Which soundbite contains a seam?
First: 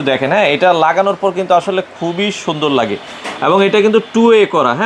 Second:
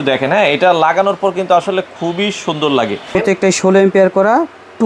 second; 1 cut; at 3.1 s

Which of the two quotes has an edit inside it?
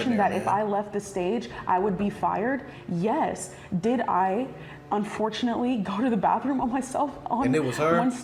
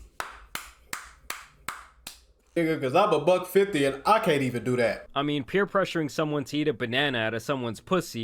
second; 2 cuts; at 2.6 s, 5.1 s

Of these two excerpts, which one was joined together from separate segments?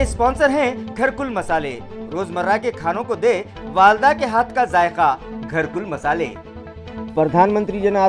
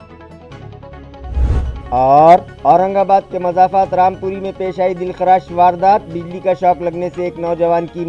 second; 1 cut; at 1.9 s

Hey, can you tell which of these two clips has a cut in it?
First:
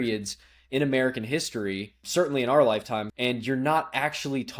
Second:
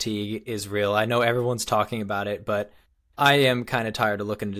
first; 2 cuts; at 2.0 s, 3.1 s

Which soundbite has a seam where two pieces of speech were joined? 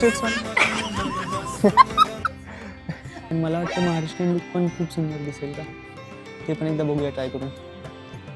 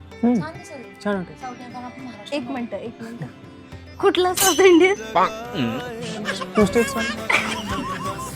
first; 1 cut; at 3.2 s

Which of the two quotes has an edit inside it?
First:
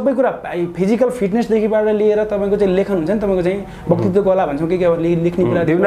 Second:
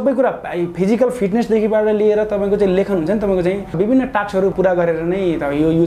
second; 2 cuts; at 3.7 s, 4.5 s

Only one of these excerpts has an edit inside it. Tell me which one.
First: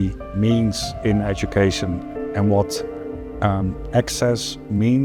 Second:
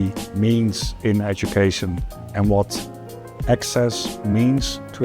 second; 1 cut; at 3.3 s

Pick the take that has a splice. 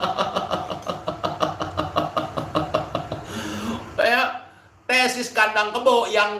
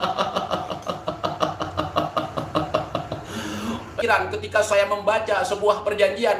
second; 1 cut; at 3.9 s

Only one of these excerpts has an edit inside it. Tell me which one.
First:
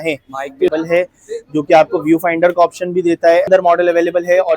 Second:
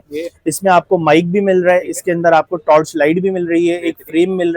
first; 2 cuts; at 0.7 s, 3.5 s

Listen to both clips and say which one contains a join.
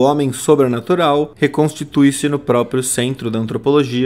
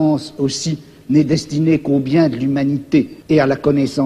second; 1 cut; at 3.2 s

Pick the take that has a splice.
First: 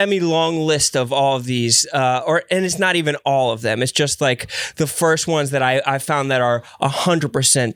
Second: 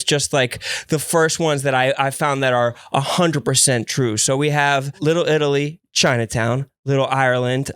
second; 1 cut; at 4.9 s

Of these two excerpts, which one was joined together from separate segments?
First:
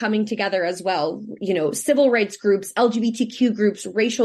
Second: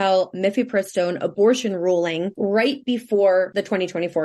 second; 2 cuts; at 2.3 s, 3.5 s

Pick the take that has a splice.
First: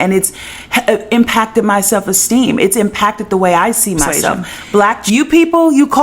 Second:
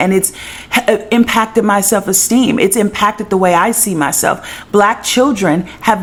first; 1 cut; at 5.0 s

